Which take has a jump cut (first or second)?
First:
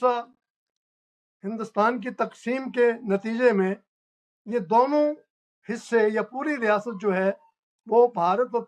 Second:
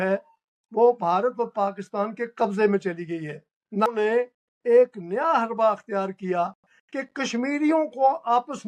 second